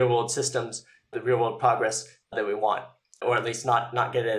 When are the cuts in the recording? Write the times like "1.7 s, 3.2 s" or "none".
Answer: 1.1 s, 2.3 s, 3.2 s